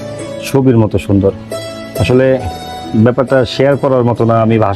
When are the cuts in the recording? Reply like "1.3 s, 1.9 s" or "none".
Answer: none